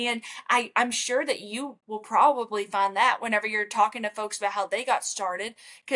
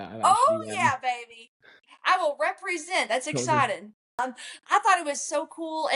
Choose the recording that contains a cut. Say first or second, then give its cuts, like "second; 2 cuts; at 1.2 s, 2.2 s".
second; 1 cut; at 4.2 s